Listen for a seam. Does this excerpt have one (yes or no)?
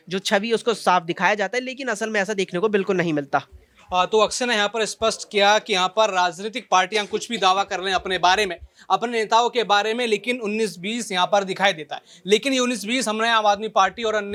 no